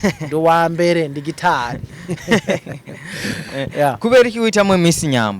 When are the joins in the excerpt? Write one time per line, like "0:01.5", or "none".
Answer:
none